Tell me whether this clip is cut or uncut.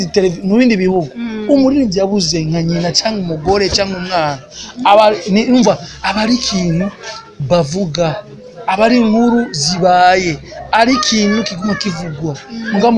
uncut